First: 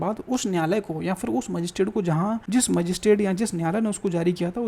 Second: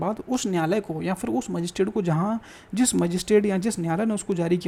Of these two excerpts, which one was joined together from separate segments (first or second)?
first